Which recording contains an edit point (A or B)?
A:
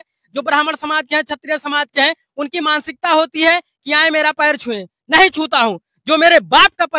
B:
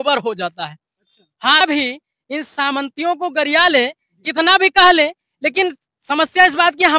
B